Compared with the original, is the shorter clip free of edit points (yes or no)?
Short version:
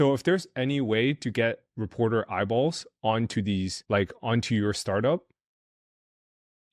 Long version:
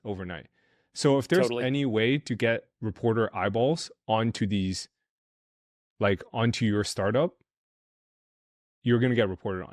no